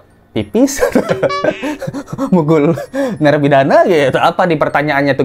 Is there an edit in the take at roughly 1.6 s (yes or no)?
no